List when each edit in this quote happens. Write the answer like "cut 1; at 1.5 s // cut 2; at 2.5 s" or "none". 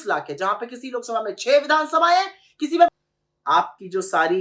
cut 1; at 2.9 s